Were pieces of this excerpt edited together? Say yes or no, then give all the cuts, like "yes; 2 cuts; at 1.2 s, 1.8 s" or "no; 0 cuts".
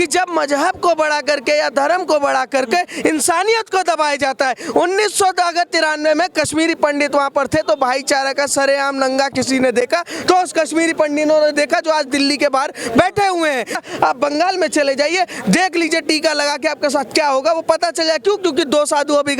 yes; 1 cut; at 13.8 s